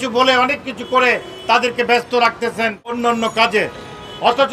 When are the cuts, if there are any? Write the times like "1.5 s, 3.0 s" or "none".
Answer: 2.8 s